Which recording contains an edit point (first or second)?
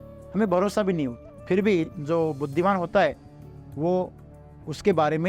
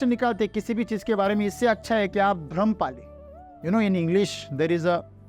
first